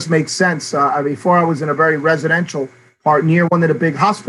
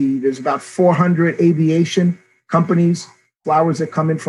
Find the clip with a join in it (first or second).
second